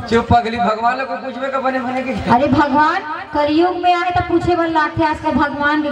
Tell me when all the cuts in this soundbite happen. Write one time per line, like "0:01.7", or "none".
none